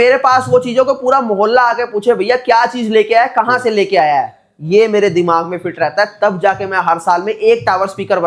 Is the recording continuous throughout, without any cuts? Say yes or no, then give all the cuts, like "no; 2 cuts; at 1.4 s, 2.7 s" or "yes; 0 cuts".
yes; 0 cuts